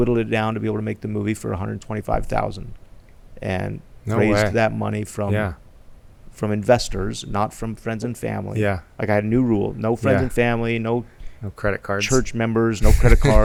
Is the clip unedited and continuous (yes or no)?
yes